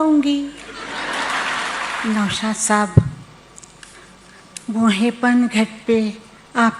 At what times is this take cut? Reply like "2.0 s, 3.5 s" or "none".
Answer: 1.9 s

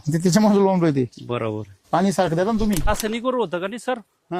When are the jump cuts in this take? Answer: 2.9 s

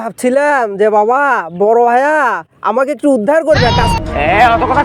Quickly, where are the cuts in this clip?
3.9 s

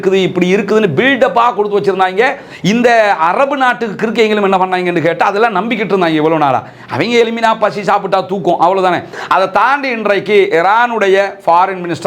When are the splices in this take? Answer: 9.1 s

